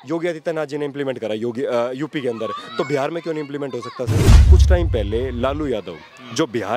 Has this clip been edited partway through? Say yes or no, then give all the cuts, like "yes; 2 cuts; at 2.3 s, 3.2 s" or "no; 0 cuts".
yes; 1 cut; at 4.4 s